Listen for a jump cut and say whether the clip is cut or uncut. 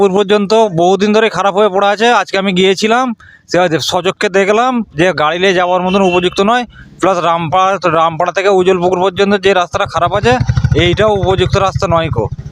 uncut